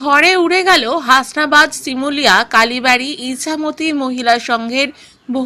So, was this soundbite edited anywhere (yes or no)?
no